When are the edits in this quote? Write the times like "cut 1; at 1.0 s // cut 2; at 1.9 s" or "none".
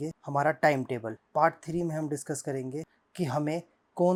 none